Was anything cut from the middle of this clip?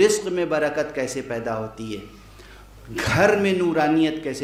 no; 0 cuts

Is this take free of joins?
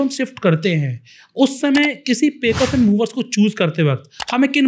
yes; 0 cuts

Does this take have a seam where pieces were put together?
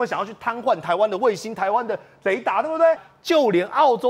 yes; 1 cut; at 3.1 s

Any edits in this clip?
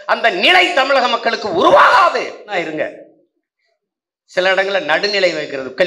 yes; 1 cut; at 2.5 s

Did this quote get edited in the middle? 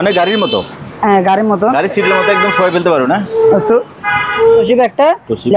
yes; 1 cut; at 4.6 s

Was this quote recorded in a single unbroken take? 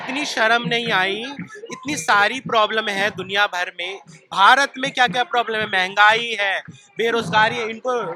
yes; 0 cuts

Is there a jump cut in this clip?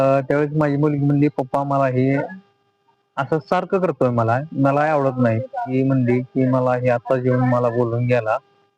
yes; 1 cut; at 5.7 s

